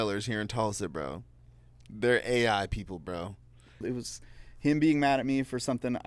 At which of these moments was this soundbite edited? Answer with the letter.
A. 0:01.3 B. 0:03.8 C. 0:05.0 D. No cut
B